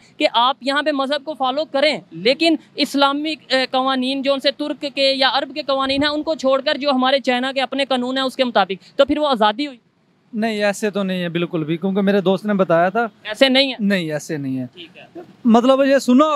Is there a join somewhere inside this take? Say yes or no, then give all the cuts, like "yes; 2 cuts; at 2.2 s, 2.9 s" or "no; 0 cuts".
no; 0 cuts